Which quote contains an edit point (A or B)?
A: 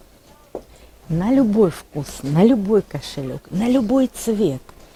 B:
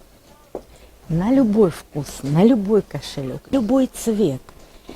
B